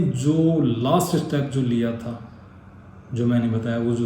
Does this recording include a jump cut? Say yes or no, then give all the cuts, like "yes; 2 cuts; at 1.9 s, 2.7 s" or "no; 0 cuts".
no; 0 cuts